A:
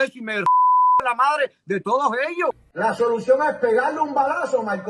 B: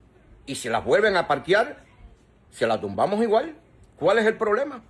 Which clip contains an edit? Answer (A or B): A